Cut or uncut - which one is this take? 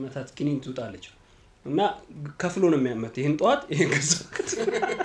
uncut